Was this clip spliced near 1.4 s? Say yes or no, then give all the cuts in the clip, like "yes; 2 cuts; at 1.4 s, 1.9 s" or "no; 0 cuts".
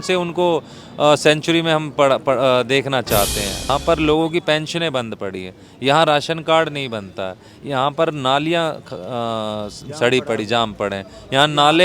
no; 1 cut; at 3.7 s